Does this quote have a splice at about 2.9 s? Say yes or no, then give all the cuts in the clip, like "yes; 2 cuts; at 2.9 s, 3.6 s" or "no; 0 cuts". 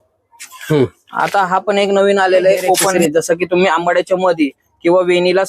yes; 1 cut; at 2.9 s